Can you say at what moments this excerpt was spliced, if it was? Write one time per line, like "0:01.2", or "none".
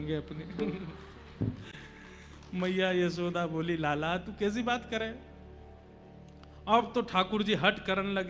none